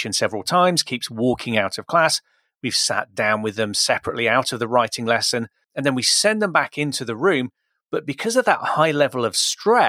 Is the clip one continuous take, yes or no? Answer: no